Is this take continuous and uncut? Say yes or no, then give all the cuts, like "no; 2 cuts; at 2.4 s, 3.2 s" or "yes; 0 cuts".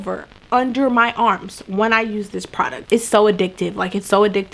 no; 1 cut; at 2.8 s